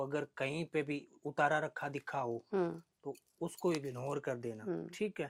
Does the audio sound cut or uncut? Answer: uncut